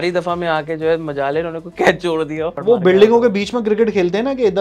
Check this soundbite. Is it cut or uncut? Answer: cut